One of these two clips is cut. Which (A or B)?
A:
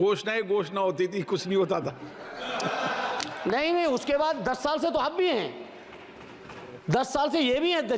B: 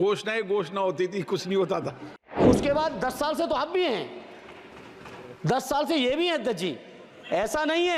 B